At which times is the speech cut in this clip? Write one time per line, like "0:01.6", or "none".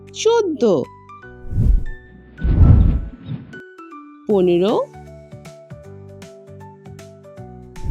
0:01.0